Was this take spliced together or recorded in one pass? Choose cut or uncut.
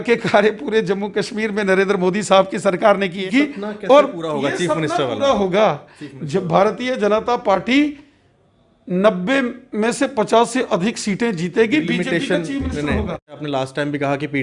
cut